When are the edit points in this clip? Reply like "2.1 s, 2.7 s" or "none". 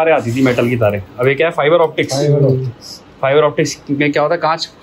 none